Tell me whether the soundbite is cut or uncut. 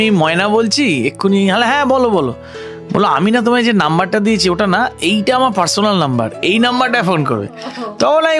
uncut